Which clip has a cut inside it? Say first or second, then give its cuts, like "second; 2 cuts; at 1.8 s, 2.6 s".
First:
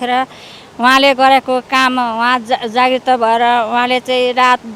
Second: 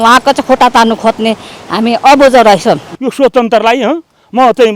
second; 1 cut; at 2.9 s